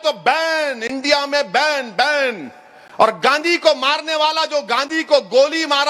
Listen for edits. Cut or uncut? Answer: uncut